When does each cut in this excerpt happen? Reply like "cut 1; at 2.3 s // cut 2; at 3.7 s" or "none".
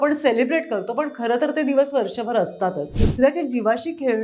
cut 1; at 3.0 s